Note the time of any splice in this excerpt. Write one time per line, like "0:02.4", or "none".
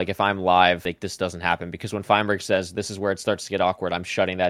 none